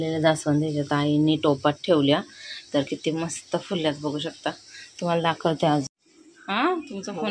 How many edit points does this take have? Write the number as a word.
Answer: one